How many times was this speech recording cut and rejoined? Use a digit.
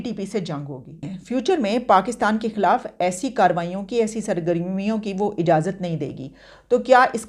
1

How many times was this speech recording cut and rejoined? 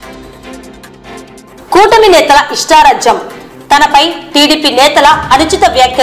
1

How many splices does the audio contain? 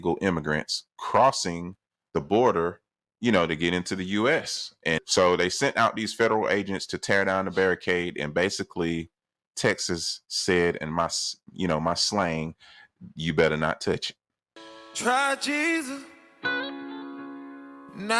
1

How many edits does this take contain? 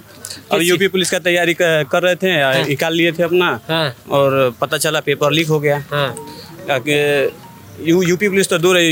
0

